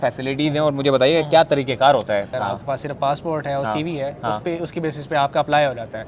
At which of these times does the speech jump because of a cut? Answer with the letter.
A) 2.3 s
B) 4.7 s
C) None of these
A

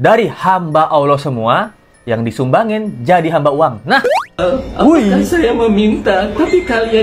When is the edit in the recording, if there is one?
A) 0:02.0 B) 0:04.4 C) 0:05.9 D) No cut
B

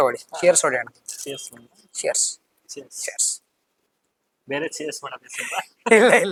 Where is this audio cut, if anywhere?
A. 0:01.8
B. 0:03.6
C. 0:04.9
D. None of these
D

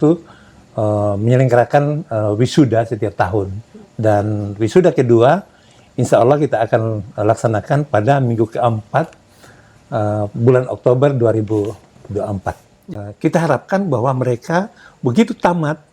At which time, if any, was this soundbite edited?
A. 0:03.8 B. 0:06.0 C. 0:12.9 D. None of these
C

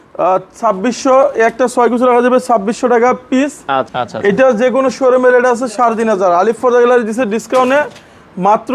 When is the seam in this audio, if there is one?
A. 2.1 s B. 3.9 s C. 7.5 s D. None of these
B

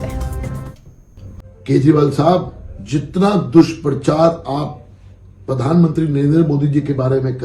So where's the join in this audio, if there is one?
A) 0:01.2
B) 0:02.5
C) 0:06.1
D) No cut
A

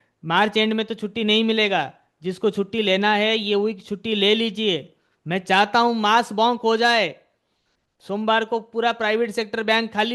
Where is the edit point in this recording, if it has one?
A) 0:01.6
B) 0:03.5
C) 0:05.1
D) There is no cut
D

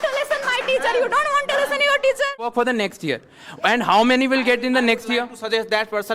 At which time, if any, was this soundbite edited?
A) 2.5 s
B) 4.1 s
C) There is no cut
A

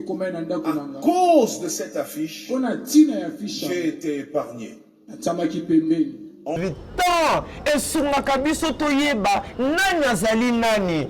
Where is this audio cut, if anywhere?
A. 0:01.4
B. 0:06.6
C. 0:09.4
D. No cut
B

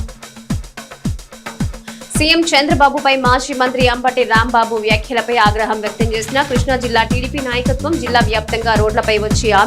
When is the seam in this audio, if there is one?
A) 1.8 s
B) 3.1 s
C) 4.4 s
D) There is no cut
A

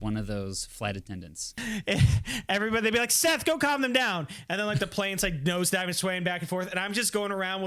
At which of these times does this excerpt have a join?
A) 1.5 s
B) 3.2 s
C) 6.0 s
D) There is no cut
A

